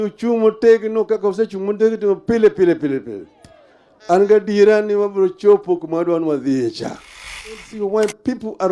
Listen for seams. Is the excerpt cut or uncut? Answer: cut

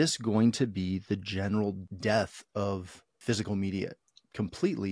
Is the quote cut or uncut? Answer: cut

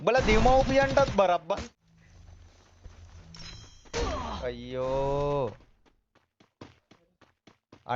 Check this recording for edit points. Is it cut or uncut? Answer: cut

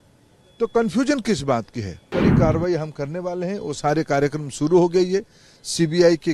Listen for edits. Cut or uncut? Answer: cut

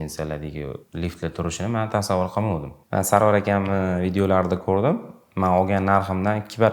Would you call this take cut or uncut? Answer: cut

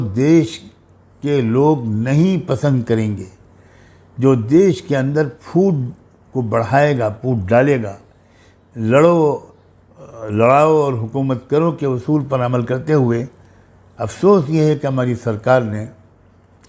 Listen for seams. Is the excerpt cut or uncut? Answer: uncut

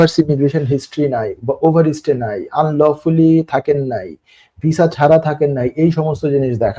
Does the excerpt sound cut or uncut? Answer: uncut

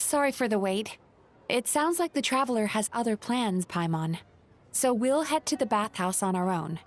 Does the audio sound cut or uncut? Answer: uncut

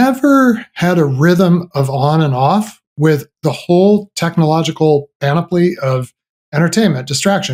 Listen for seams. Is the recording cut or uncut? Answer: uncut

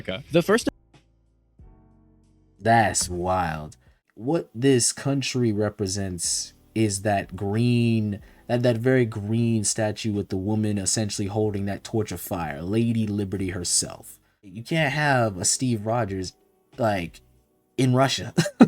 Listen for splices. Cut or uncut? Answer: cut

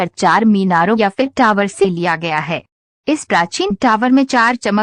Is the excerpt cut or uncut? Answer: uncut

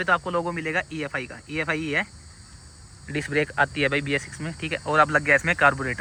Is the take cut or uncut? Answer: uncut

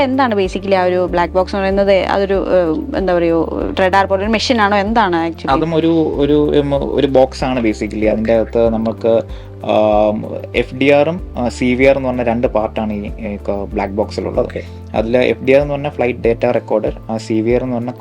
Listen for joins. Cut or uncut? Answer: uncut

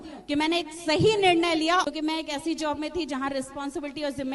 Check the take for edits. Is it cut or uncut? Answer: cut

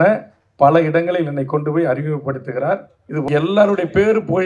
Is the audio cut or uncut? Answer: cut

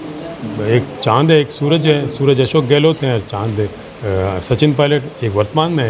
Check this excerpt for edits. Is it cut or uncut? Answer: uncut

